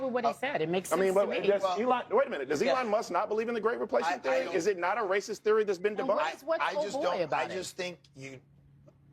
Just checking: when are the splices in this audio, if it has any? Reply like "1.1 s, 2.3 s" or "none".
none